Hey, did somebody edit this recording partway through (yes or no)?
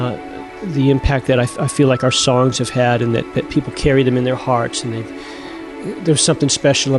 no